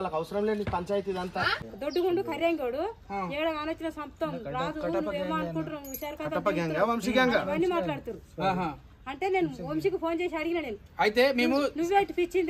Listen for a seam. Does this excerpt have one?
yes; 1 cut; at 1.7 s

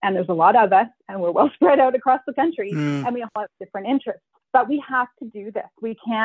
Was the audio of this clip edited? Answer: yes; 1 cut; at 4.3 s

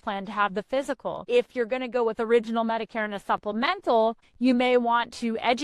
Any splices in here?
yes; 2 cuts; at 1.2 s, 4.3 s

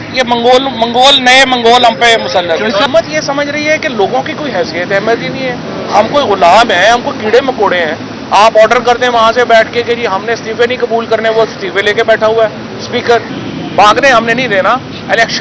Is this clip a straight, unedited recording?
no; 2 cuts; at 2.9 s, 13.4 s

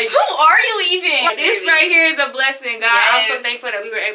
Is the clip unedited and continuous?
no; 1 cut; at 1.3 s

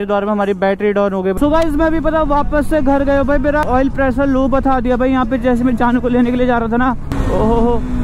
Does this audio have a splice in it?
yes; 3 cuts; at 1.4 s, 3.6 s, 7.1 s

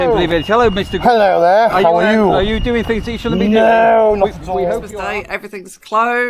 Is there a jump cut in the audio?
yes; 1 cut; at 4.9 s

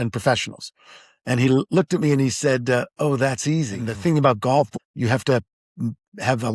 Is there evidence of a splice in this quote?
yes; 2 cuts; at 3.8 s, 4.8 s

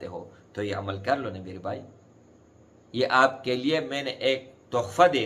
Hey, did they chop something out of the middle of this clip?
no; 0 cuts

